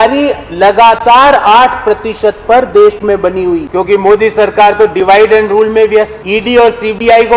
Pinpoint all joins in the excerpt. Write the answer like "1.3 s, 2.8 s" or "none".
3.7 s, 6.2 s

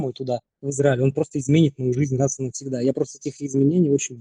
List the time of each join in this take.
none

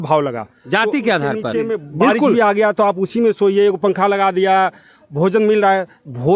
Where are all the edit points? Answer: 2.3 s

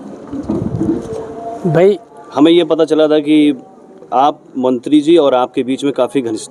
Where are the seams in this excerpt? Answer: 2.2 s

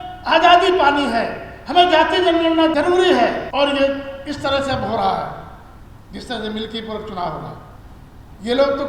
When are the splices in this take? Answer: 2.7 s, 3.4 s

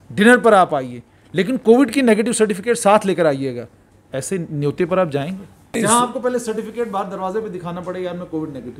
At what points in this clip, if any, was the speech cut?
5.7 s

